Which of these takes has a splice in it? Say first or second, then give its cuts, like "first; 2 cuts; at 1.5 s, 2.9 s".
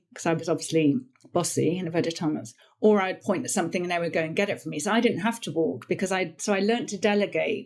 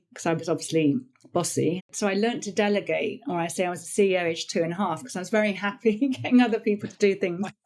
second; 1 cut; at 1.8 s